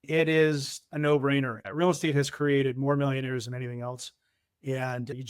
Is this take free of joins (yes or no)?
no